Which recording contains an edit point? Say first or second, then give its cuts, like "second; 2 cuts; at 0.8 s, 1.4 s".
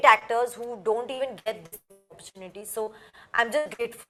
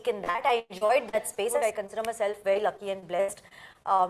second; 1 cut; at 1.6 s